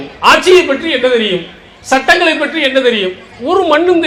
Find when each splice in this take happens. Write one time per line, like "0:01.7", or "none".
none